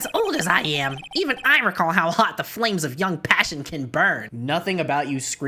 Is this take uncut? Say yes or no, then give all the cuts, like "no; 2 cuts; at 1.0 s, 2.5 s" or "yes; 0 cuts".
no; 1 cut; at 4.3 s